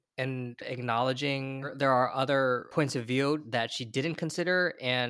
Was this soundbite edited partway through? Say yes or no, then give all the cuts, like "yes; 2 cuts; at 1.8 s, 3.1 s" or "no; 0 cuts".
yes; 3 cuts; at 1.6 s, 2.7 s, 3.5 s